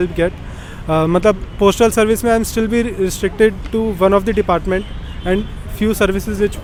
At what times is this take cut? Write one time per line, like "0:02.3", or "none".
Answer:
none